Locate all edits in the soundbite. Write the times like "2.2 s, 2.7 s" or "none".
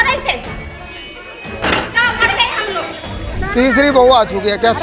3.4 s

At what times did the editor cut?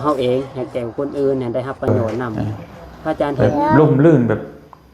3.7 s

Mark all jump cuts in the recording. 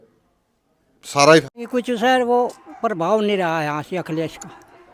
1.6 s

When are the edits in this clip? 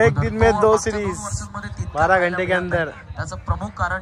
none

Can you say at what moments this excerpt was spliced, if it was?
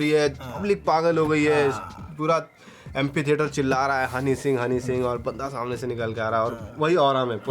none

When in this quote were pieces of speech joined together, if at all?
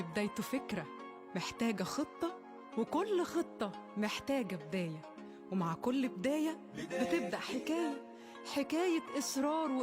none

